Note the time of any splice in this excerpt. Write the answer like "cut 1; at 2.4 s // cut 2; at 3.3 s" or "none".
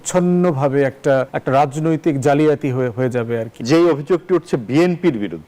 cut 1; at 1.4 s // cut 2; at 3.5 s